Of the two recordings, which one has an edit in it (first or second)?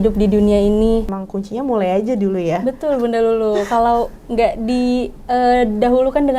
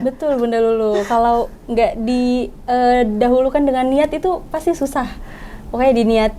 first